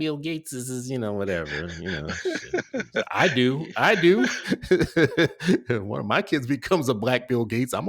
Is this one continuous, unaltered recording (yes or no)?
yes